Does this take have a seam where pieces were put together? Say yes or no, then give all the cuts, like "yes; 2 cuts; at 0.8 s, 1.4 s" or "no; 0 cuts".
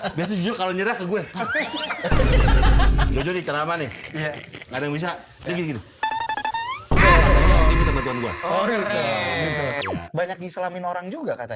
yes; 1 cut; at 9.8 s